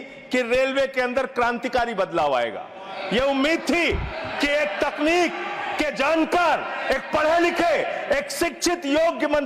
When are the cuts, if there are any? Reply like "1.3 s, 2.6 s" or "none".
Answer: none